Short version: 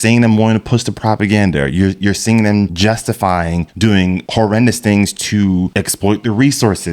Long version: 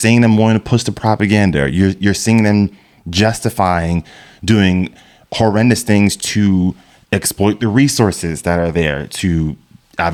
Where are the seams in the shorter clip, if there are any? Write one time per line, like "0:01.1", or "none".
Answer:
0:02.7
0:03.9
0:05.7